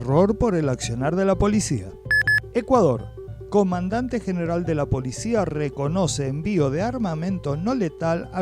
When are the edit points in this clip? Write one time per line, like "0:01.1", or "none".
0:02.0